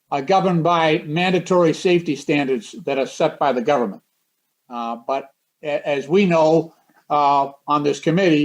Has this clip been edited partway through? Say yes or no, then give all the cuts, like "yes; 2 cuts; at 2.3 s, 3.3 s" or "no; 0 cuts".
no; 0 cuts